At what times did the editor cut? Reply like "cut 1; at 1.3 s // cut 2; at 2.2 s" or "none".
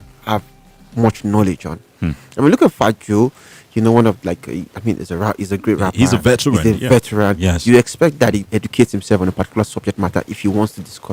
none

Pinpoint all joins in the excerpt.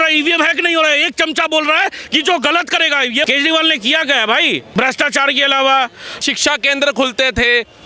cut 1; at 3.3 s // cut 2; at 4.6 s // cut 3; at 6.1 s

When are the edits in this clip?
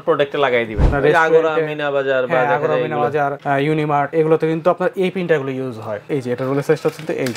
cut 1; at 0.9 s // cut 2; at 4.1 s // cut 3; at 6.1 s

